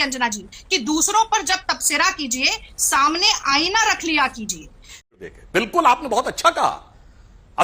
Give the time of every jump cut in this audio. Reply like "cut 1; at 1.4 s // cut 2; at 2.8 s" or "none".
cut 1; at 5.0 s

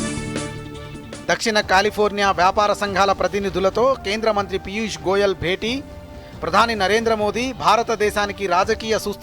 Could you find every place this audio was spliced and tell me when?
cut 1; at 1.0 s

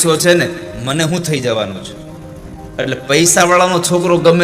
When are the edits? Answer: none

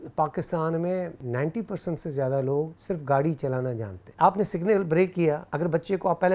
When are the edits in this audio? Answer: cut 1; at 1.2 s // cut 2; at 2.8 s // cut 3; at 4.0 s // cut 4; at 5.5 s

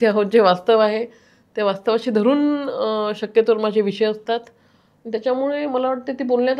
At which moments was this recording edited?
none

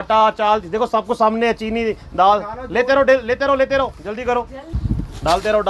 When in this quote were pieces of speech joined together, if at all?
cut 1; at 4.7 s

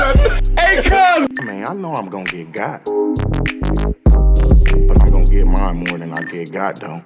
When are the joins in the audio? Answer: cut 1; at 1.3 s

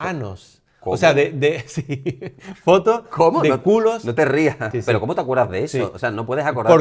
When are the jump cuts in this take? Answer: cut 1; at 4.7 s

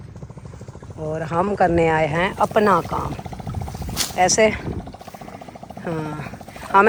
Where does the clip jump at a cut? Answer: none

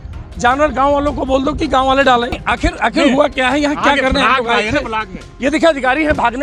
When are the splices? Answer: cut 1; at 2.4 s

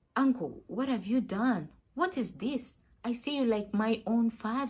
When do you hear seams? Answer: none

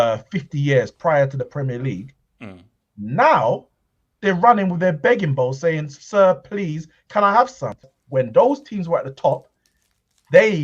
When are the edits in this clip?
cut 1; at 7.9 s

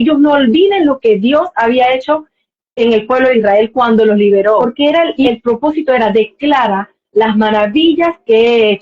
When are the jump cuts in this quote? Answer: cut 1; at 4.6 s

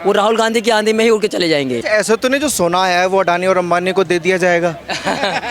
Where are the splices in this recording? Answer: cut 1; at 1.8 s

